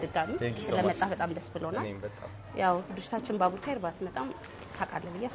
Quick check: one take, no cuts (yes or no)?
yes